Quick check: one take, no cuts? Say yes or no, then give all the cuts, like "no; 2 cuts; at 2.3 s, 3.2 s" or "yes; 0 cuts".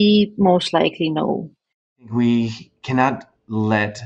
no; 1 cut; at 2.1 s